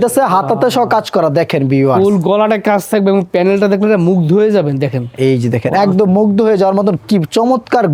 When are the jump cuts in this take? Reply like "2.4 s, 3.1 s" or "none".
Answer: none